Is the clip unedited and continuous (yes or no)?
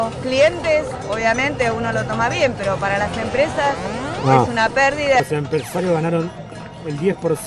yes